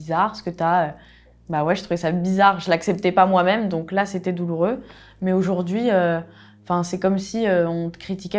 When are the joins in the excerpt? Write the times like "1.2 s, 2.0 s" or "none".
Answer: none